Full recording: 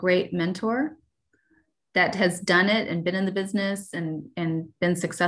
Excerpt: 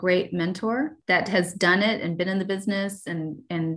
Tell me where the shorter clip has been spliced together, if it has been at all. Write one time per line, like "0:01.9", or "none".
0:01.0